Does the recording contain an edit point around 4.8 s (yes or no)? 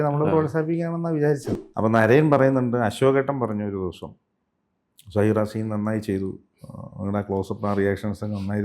no